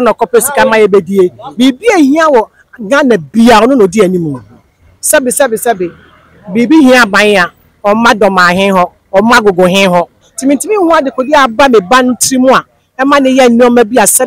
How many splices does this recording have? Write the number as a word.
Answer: one